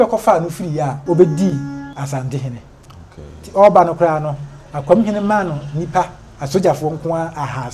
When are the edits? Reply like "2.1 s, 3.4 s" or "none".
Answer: 0.9 s, 1.9 s